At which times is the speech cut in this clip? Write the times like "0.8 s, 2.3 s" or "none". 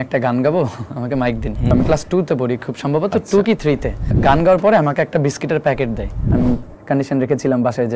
1.7 s, 4.1 s, 6.3 s